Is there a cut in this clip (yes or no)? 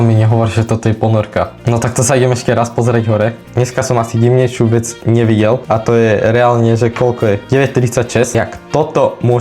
yes